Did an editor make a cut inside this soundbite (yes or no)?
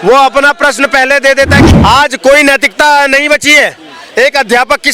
yes